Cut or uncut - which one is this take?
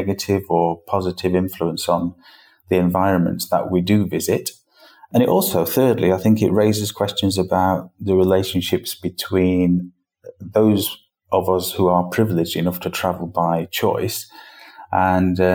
cut